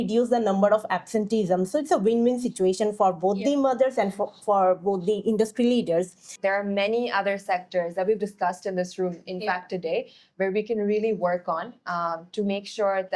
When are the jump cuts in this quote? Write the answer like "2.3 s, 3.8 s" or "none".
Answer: 6.3 s